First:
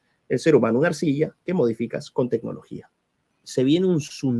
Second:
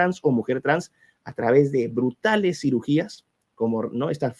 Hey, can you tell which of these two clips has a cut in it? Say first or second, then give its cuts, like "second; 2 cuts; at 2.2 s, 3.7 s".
first; 1 cut; at 3.4 s